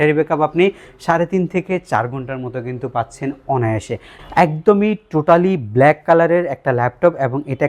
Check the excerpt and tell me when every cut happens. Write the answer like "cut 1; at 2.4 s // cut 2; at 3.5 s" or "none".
cut 1; at 4.1 s